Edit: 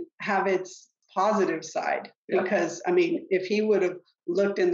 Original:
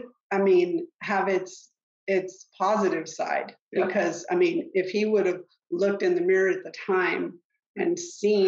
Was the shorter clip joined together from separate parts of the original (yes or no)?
yes